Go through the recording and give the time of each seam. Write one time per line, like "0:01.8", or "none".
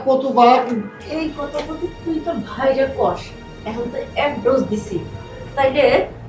0:01.0